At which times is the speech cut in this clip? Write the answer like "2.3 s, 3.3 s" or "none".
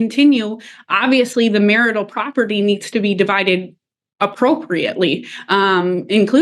none